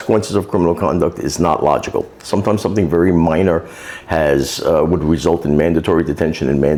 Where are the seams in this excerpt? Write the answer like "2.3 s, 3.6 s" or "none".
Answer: none